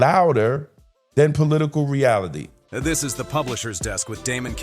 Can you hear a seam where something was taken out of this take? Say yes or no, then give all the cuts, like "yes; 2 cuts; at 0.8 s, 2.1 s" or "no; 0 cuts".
yes; 1 cut; at 2.5 s